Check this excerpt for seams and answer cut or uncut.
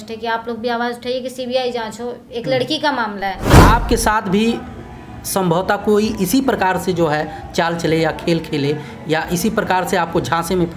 cut